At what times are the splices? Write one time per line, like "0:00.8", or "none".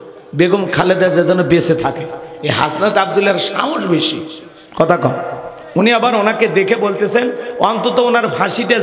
none